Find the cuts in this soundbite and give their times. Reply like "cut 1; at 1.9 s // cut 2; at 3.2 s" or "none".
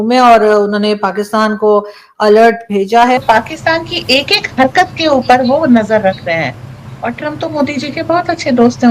cut 1; at 3.2 s